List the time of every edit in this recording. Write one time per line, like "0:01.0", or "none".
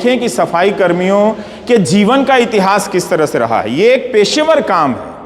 none